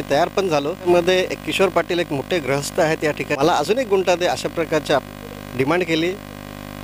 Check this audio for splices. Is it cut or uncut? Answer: cut